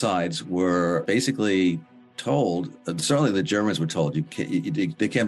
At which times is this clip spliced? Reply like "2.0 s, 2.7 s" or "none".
1.0 s